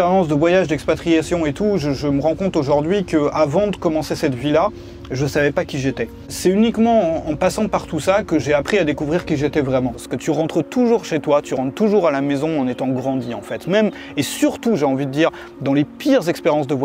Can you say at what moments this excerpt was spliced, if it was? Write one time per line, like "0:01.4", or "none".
0:06.3
0:10.1